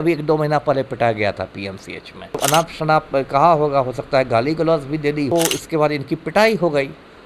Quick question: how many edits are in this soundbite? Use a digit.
2